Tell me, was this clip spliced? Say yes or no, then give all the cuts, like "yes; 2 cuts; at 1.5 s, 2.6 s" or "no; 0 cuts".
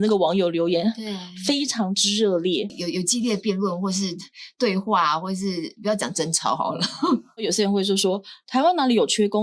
yes; 2 cuts; at 2.7 s, 7.4 s